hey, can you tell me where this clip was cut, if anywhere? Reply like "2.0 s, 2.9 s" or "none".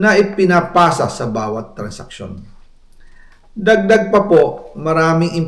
none